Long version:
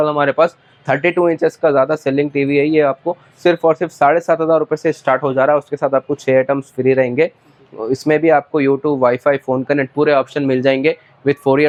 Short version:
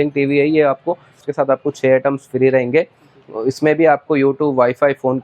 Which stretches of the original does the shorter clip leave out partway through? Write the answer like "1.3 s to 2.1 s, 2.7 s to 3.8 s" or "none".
3.4 s to 5.6 s

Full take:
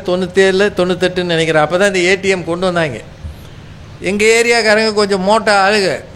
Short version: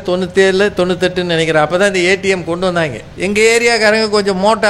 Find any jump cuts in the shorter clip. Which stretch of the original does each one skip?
3.1 s to 3.9 s

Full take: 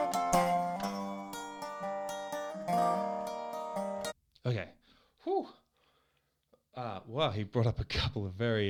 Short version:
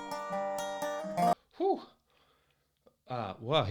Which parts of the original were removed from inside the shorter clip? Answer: 2.8 s to 5.0 s

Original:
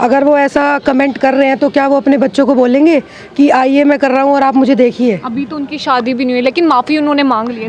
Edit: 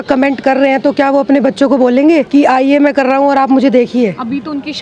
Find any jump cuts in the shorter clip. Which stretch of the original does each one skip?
3.0 s to 3.3 s

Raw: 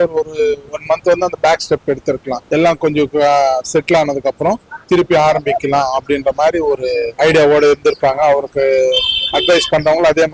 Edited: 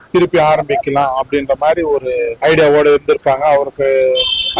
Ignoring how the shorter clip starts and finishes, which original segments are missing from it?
none

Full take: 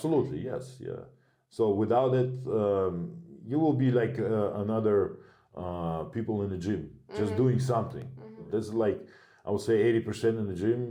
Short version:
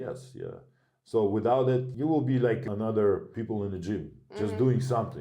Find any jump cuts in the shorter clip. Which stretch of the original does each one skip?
2.4 s to 3.4 s, 4.2 s to 4.5 s, 5.2 s to 6.1 s

